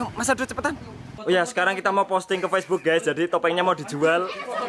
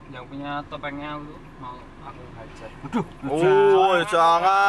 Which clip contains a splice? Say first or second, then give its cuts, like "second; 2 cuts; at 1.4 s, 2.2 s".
first; 1 cut; at 1.1 s